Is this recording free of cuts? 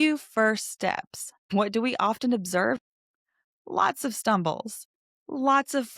no; 2 cuts; at 1.5 s, 2.8 s

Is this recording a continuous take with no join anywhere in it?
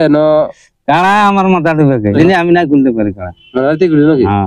no; 1 cut; at 2.2 s

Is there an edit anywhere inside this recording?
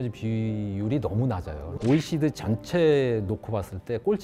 no; 0 cuts

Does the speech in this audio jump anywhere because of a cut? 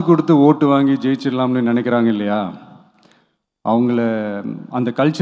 no; 0 cuts

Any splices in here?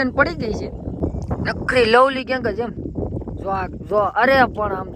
yes; 1 cut; at 1.0 s

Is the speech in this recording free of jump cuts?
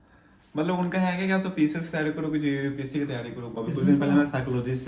no; 1 cut; at 3.5 s

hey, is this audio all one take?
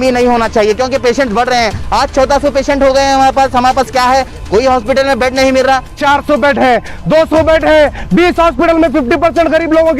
no; 1 cut; at 6.0 s

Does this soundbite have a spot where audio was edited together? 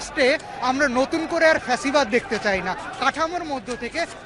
no; 0 cuts

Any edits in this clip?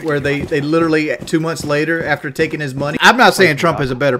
yes; 1 cut; at 2.9 s

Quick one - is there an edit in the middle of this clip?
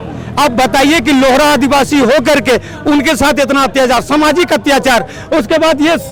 no; 0 cuts

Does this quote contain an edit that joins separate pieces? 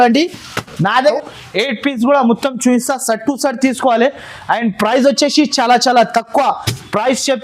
yes; 1 cut; at 1.1 s

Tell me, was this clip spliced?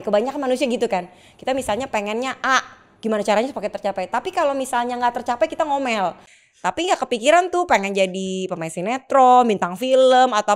yes; 1 cut; at 6.3 s

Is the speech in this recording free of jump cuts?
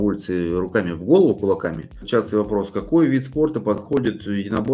no; 1 cut; at 2.0 s

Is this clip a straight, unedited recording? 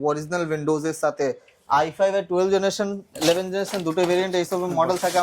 no; 1 cut; at 1.5 s

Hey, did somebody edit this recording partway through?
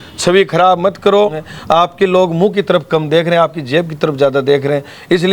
yes; 1 cut; at 1.5 s

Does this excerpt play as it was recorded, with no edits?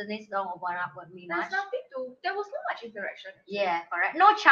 yes; 0 cuts

